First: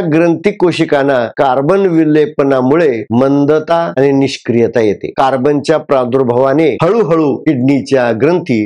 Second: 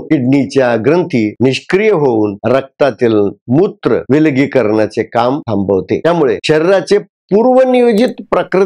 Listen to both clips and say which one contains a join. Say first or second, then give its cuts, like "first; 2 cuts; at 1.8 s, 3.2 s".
first; 2 cuts; at 1.3 s, 5.1 s